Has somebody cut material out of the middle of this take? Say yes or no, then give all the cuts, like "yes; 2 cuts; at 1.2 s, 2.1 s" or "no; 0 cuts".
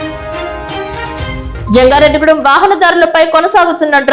yes; 1 cut; at 1.5 s